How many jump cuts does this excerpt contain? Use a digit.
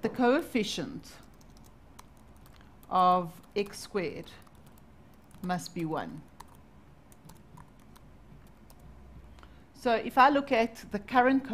1